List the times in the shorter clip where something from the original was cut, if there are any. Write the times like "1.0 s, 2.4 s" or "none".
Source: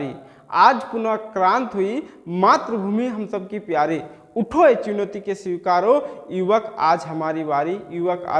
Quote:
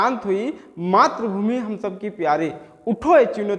none